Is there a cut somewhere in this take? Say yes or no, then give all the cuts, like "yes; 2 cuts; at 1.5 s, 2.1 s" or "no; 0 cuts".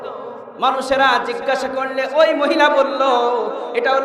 no; 0 cuts